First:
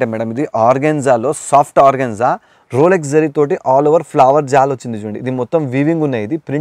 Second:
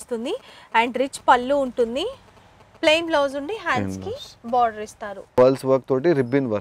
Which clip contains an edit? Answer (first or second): second